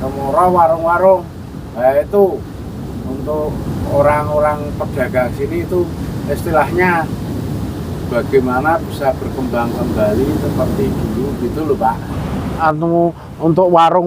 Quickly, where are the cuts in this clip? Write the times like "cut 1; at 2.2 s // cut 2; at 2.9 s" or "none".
cut 1; at 12.6 s